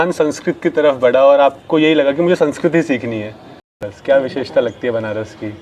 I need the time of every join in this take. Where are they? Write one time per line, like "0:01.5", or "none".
0:03.9

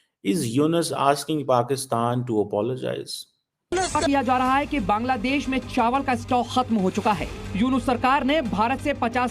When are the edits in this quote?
0:03.9

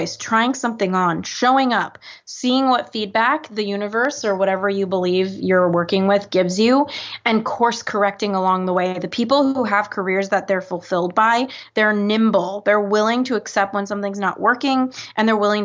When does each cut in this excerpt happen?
none

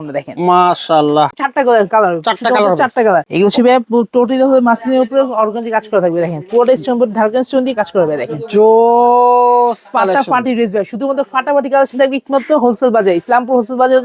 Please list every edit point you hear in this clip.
0:01.3
0:03.3

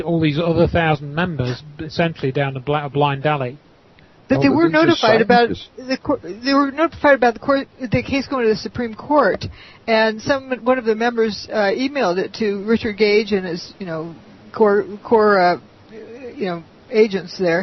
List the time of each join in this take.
0:08.2

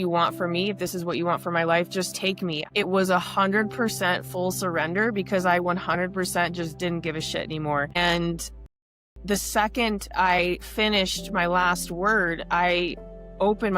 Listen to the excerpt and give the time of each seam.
0:02.6
0:08.0

